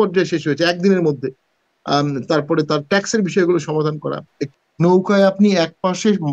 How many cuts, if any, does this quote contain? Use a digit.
1